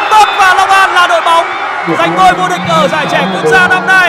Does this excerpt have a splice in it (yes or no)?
no